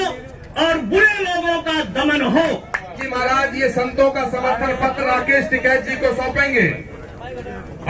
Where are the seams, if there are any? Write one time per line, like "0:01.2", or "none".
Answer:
0:02.9